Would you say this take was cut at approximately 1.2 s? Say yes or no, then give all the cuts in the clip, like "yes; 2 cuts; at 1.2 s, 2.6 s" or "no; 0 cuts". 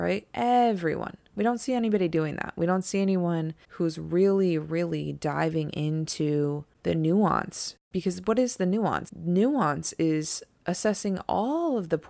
no; 4 cuts; at 3.6 s, 6.7 s, 7.9 s, 9.1 s